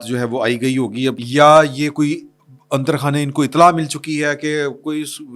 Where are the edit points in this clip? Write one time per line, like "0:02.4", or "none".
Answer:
0:01.2